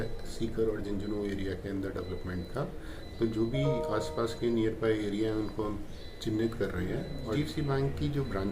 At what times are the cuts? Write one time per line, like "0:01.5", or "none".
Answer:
0:07.4